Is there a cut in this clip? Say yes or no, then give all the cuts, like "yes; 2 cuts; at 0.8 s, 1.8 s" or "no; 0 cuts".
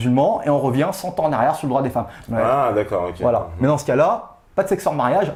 no; 0 cuts